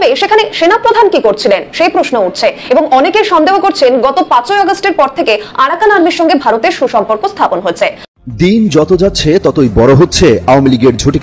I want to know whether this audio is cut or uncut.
cut